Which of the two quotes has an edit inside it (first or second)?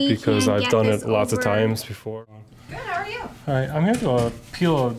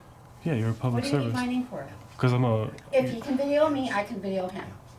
first